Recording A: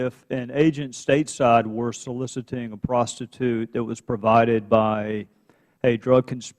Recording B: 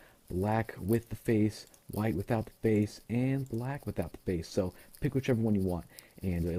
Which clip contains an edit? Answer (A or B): A